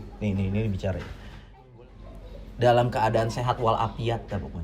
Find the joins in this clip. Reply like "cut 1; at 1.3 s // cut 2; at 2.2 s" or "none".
cut 1; at 1.6 s